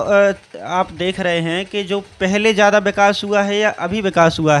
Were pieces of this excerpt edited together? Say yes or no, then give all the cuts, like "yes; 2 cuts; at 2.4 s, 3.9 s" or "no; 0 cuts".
no; 0 cuts